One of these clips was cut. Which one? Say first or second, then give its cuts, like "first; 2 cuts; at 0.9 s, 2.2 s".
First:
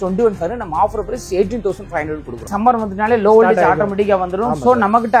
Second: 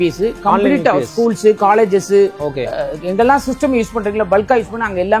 first; 1 cut; at 2.4 s